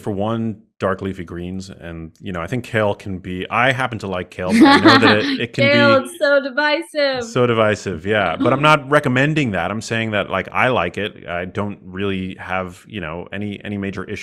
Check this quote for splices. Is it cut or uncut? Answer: uncut